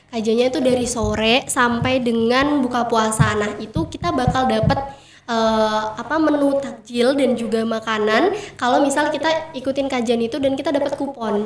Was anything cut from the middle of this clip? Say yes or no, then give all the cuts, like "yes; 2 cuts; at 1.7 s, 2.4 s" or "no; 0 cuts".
no; 0 cuts